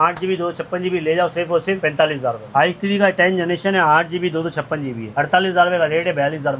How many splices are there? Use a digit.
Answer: 1